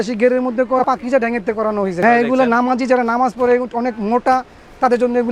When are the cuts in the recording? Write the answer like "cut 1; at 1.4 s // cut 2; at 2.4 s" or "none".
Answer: cut 1; at 0.8 s // cut 2; at 2.0 s

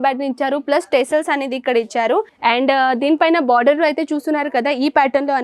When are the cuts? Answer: cut 1; at 2.3 s

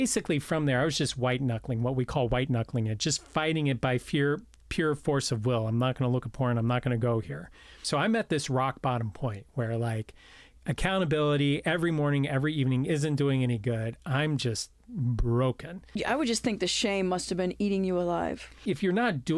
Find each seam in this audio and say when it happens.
cut 1; at 7.9 s // cut 2; at 16.0 s // cut 3; at 18.6 s

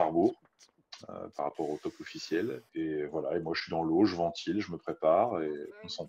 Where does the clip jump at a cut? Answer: cut 1; at 2.6 s

